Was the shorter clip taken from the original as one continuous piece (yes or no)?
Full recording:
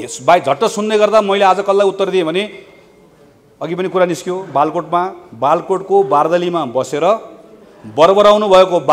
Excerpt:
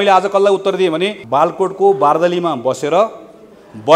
no